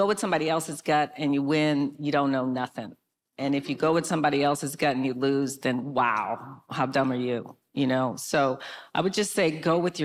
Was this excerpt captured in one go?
yes; 0 cuts

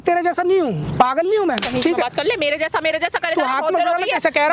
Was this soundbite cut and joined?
no; 0 cuts

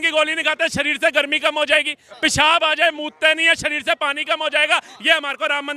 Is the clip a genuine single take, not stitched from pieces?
yes; 0 cuts

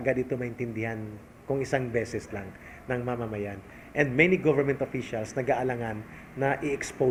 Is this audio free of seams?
yes; 0 cuts

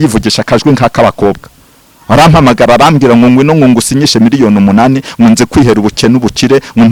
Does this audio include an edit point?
no; 0 cuts

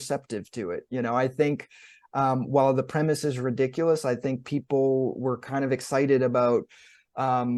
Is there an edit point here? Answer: no; 0 cuts

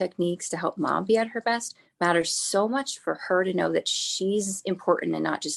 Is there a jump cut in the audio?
no; 0 cuts

